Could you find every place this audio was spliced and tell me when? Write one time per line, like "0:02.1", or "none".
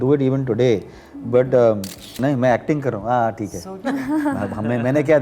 0:02.2